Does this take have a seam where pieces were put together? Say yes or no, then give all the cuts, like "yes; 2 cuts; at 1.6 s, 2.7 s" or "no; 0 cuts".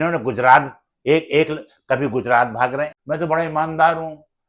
yes; 1 cut; at 3.0 s